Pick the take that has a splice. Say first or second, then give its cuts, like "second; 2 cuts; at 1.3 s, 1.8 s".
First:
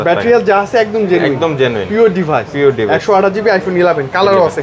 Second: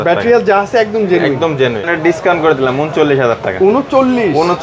second; 1 cut; at 1.9 s